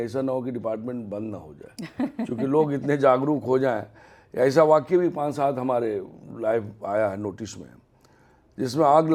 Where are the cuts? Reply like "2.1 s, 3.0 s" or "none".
none